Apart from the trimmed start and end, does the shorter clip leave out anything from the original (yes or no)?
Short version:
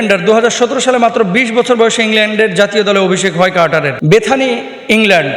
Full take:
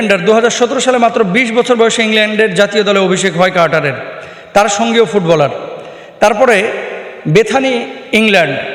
yes